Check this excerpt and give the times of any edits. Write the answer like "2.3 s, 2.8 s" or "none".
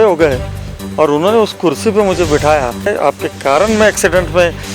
2.9 s